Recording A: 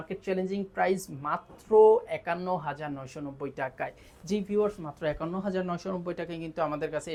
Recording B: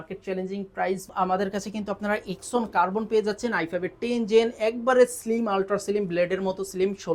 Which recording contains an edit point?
B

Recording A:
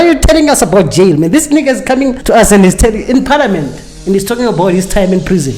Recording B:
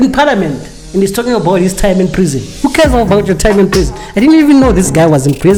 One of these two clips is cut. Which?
A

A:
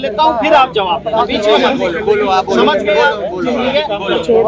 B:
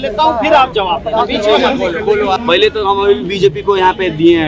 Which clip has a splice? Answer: B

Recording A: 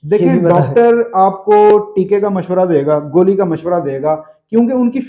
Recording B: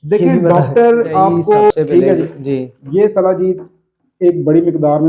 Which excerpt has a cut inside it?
B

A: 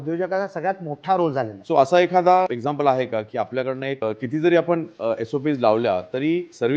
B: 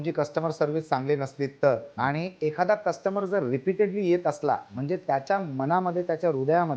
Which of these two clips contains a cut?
A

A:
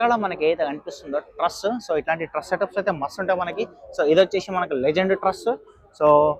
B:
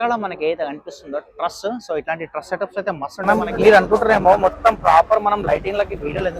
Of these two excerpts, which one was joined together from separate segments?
B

